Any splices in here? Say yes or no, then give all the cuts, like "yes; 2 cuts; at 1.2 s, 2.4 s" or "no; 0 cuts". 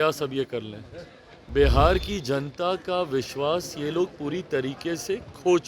no; 0 cuts